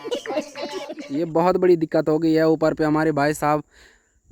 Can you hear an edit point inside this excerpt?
yes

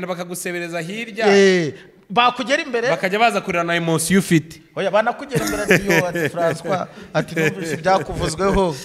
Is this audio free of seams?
yes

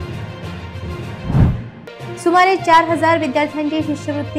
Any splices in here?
yes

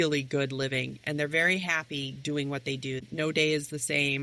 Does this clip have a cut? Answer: yes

